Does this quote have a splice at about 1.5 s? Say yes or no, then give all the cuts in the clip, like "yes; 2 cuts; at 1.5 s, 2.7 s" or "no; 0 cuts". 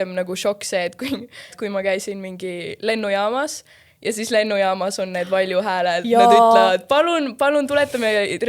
yes; 1 cut; at 1.5 s